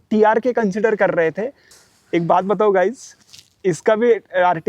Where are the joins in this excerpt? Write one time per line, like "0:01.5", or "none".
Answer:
0:01.8